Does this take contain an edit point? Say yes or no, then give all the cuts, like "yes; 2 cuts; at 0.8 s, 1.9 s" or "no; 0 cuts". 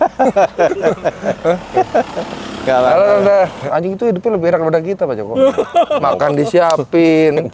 yes; 1 cut; at 3.6 s